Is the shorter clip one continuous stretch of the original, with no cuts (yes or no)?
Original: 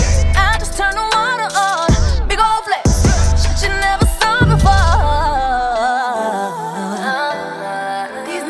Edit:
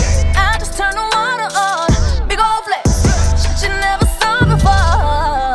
yes